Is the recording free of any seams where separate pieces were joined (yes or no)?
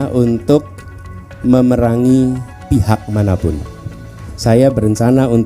yes